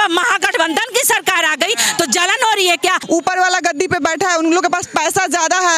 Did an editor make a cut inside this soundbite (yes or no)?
yes